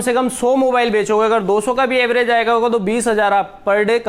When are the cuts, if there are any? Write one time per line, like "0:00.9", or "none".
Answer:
none